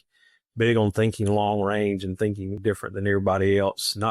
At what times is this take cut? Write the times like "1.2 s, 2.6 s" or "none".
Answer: 2.6 s